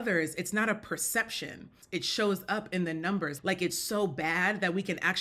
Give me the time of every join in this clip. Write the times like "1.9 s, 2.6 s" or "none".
1.8 s, 3.3 s

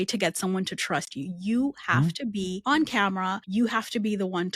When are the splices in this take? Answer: 2.6 s, 3.4 s

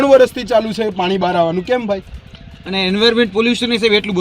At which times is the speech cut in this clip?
none

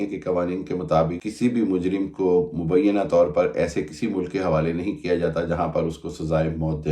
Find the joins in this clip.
1.2 s

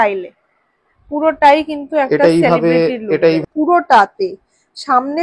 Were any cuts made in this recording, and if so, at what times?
3.4 s

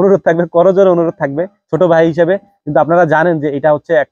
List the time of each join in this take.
2.5 s

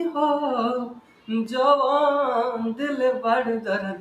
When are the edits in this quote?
none

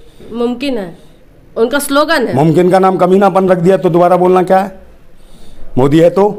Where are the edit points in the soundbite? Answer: none

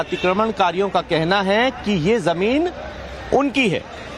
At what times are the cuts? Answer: 2.4 s

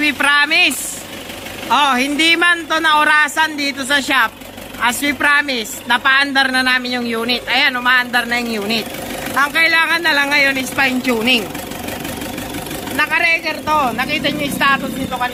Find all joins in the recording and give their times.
none

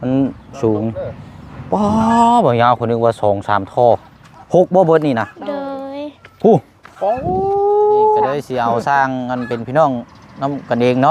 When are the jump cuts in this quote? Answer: 8.5 s

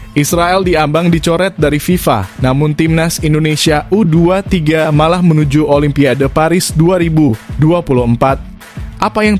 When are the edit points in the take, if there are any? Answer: none

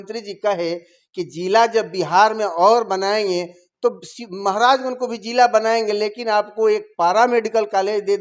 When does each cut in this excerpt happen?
none

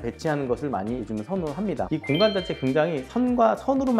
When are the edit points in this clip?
1.9 s

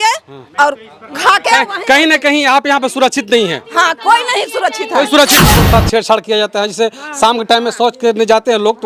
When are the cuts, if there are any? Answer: 5.5 s

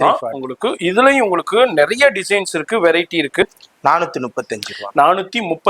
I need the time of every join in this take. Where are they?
3.4 s

